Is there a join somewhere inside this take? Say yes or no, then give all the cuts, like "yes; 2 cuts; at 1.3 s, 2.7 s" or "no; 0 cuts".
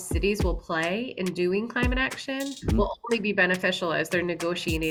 no; 0 cuts